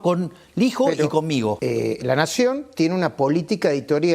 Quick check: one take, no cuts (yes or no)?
no